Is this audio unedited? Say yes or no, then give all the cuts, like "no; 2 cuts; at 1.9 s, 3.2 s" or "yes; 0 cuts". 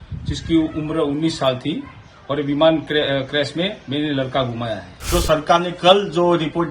no; 1 cut; at 5.1 s